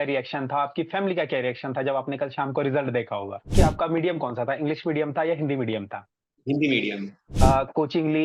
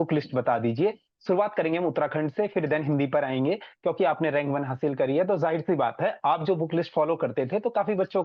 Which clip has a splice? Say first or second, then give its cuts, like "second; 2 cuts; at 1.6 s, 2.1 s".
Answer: first; 2 cuts; at 3.5 s, 7.2 s